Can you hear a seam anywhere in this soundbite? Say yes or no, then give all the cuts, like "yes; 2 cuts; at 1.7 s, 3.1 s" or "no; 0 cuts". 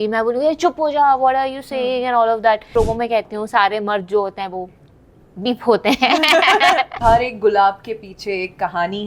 yes; 2 cuts; at 2.6 s, 6.9 s